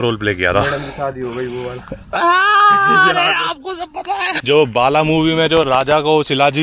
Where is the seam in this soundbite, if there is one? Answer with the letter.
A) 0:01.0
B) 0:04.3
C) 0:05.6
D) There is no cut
B